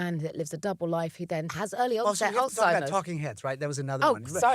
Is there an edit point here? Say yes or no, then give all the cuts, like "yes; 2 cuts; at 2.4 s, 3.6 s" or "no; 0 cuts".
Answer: yes; 1 cut; at 1.5 s